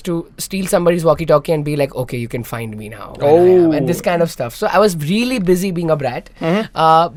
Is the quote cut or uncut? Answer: uncut